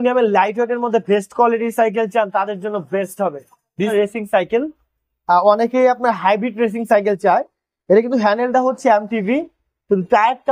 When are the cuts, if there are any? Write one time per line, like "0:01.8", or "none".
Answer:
0:03.9